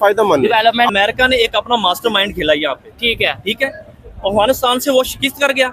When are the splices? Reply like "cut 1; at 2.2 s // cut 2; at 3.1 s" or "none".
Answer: cut 1; at 0.9 s